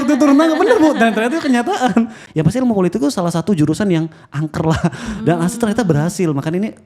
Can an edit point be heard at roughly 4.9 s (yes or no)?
no